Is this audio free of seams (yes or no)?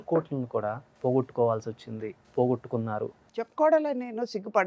no